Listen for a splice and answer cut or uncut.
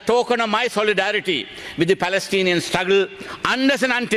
uncut